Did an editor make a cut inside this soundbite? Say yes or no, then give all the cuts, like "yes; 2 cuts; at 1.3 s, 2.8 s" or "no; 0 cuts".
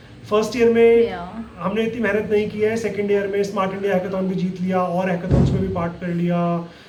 no; 0 cuts